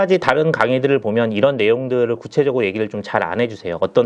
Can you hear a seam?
no; 0 cuts

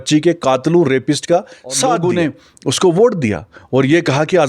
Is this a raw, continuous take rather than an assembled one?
no; 1 cut; at 2.0 s

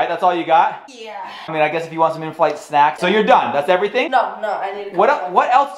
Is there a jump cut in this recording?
yes; 3 cuts; at 1.4 s, 3.0 s, 4.1 s

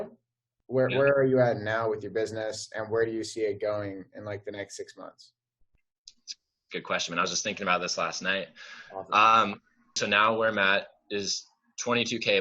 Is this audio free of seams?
no; 1 cut; at 10.0 s

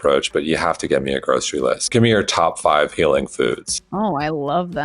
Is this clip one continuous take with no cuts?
no; 1 cut; at 1.9 s

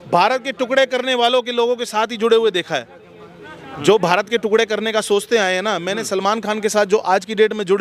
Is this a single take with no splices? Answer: yes; 0 cuts

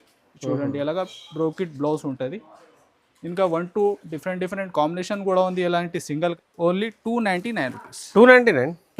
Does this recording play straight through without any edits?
no; 1 cut; at 6.3 s

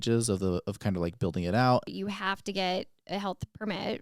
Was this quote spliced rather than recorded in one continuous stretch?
yes; 1 cut; at 1.9 s

